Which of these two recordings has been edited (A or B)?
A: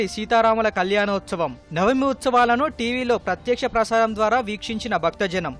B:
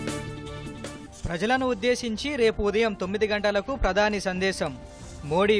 B